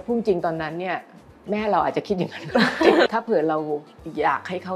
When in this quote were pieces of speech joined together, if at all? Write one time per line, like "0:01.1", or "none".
0:03.1